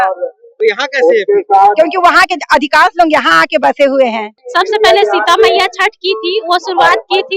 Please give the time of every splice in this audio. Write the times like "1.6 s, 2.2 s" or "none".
4.3 s